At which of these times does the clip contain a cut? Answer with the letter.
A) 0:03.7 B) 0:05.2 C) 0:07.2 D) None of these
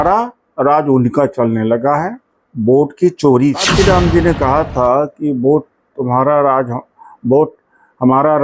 A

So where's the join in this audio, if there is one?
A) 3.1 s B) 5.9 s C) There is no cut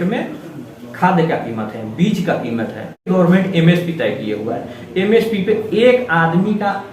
A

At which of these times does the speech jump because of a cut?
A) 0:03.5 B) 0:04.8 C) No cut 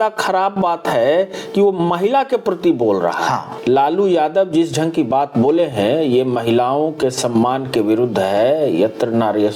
A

